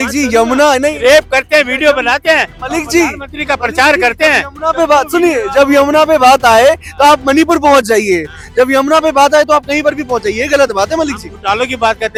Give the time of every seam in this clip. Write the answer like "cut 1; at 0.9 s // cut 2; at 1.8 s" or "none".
none